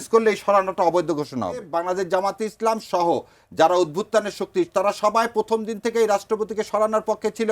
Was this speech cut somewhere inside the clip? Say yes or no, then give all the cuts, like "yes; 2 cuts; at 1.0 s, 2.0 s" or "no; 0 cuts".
yes; 1 cut; at 1.7 s